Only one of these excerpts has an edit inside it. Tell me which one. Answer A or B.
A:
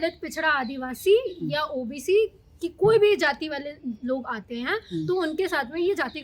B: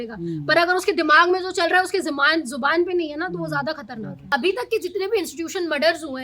B